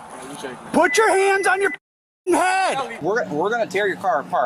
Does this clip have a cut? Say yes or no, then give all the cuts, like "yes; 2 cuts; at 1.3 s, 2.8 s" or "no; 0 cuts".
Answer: yes; 1 cut; at 3.0 s